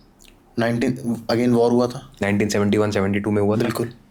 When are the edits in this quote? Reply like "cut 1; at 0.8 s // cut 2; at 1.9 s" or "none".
none